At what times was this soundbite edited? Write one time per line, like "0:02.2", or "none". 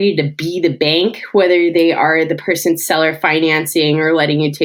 none